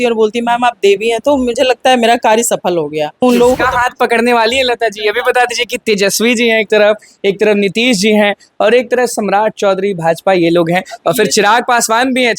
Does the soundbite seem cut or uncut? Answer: cut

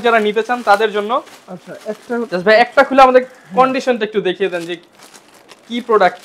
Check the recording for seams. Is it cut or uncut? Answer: uncut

